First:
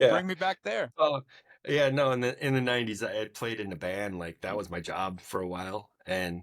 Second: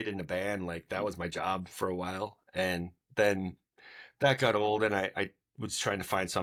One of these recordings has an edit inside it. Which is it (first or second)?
first